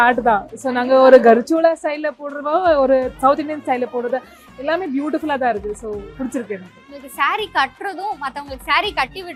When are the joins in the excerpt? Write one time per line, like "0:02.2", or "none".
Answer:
none